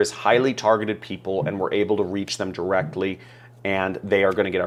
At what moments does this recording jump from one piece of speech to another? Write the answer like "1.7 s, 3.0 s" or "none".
none

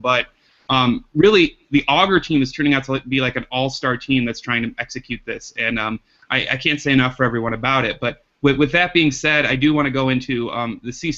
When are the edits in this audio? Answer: 2.9 s

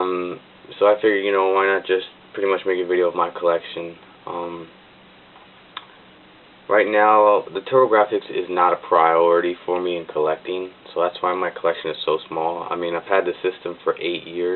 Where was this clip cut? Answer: 5.8 s

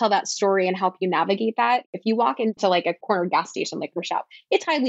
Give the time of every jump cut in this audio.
1.9 s

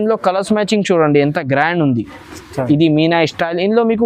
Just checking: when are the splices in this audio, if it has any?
none

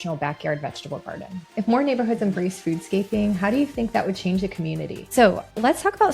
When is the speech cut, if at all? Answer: 1.6 s, 5.0 s

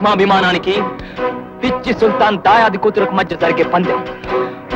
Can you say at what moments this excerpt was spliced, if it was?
none

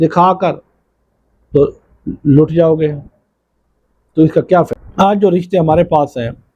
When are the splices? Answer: 4.7 s

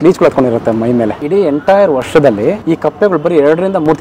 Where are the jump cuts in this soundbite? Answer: 1.2 s, 2.6 s

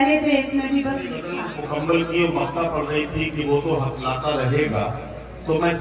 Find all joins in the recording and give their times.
1.2 s

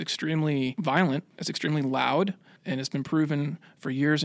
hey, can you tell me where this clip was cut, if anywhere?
1.0 s, 2.5 s

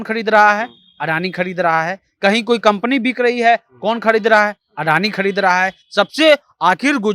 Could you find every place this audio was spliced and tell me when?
none

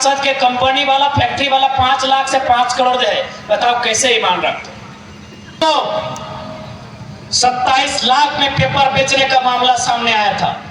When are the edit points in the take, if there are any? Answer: 5.6 s

